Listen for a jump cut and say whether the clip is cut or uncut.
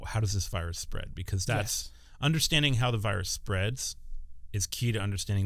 uncut